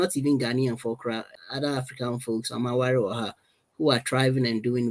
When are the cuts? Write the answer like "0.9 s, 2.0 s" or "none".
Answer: 1.4 s